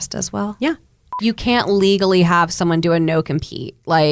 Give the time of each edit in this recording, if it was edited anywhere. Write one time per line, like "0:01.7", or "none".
0:01.0